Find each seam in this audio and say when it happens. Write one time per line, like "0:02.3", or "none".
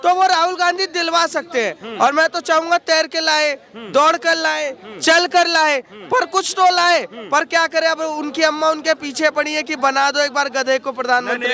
none

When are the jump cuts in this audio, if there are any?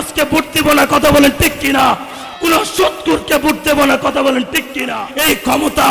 0:05.0

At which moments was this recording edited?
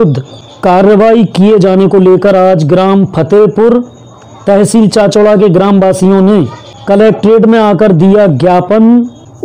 none

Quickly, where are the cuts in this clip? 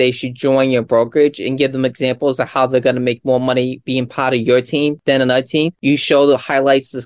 0:05.7

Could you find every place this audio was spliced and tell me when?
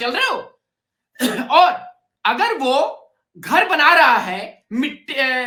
none

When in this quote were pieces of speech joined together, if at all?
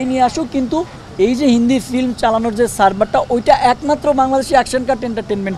none

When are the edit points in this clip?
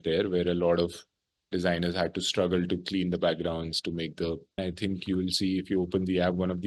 0:04.6

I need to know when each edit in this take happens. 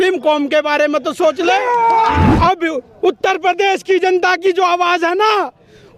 0:02.3

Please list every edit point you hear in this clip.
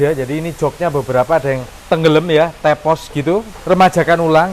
0:01.7
0:03.6

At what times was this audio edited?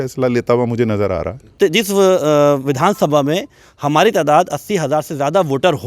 0:01.4

